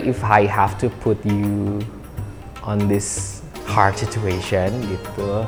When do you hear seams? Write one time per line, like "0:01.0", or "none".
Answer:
none